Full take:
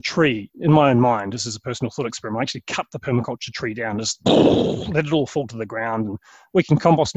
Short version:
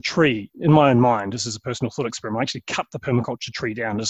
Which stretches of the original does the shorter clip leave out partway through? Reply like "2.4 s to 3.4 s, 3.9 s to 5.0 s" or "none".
none